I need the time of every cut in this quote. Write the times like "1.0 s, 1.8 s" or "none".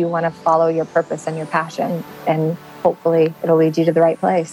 2.7 s